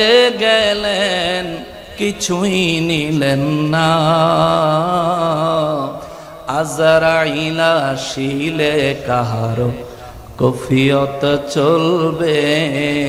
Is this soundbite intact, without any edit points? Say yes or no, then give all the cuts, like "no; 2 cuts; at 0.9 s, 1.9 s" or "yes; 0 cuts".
yes; 0 cuts